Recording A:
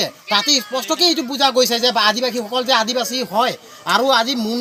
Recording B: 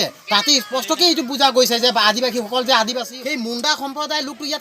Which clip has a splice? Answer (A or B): B